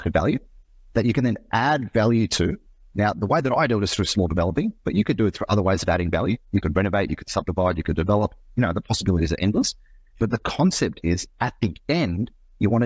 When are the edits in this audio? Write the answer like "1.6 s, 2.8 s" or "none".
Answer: none